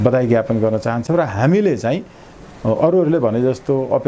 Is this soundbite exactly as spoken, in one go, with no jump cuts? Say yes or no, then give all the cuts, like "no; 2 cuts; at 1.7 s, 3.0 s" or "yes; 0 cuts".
yes; 0 cuts